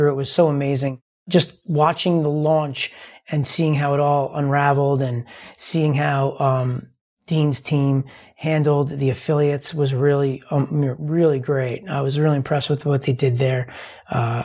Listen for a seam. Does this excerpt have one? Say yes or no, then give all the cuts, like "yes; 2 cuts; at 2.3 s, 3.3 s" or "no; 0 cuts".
yes; 1 cut; at 1.1 s